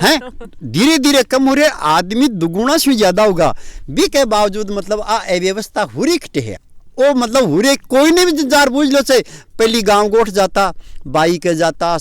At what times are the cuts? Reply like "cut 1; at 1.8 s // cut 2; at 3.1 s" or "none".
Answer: none